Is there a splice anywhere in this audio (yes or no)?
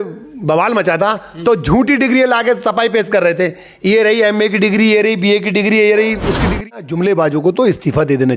yes